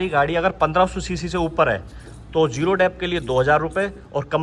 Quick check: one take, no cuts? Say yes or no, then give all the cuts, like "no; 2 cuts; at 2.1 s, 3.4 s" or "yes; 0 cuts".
yes; 0 cuts